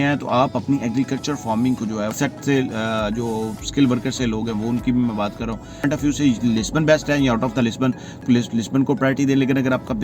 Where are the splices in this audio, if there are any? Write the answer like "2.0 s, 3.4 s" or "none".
2.2 s, 5.8 s, 8.2 s